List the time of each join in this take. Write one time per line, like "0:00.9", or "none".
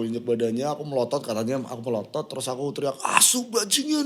none